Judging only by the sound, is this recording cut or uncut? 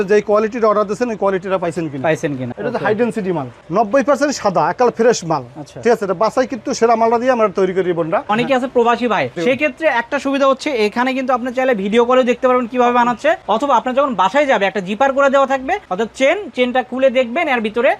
cut